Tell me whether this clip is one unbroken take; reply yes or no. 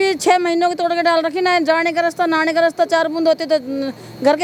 yes